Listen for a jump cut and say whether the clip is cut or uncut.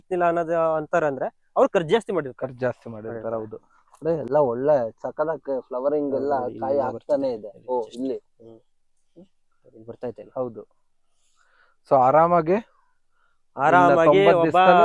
uncut